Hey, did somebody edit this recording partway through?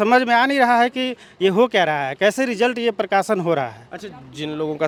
no; 0 cuts

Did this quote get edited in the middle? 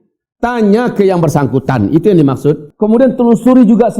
yes; 1 cut; at 2.7 s

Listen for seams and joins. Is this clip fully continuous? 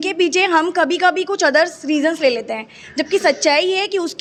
yes; 0 cuts

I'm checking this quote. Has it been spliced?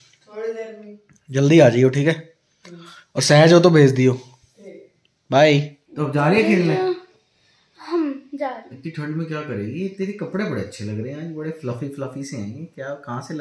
yes; 1 cut; at 5.8 s

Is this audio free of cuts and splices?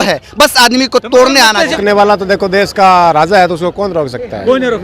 no; 1 cut; at 1.8 s

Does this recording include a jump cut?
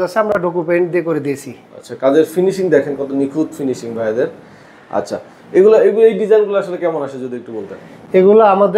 no; 0 cuts

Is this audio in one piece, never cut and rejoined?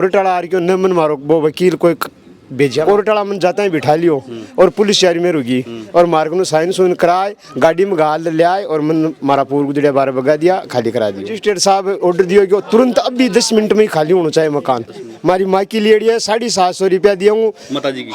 no; 3 cuts; at 2.8 s, 11.3 s, 15.1 s

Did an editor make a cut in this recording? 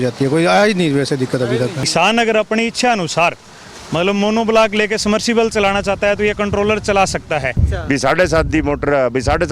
yes; 2 cuts; at 1.8 s, 7.7 s

